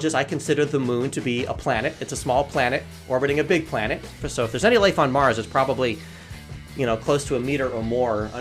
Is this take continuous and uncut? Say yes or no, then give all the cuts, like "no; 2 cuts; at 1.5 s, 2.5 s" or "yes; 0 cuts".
no; 1 cut; at 4.2 s